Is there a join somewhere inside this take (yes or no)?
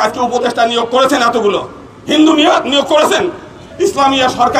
yes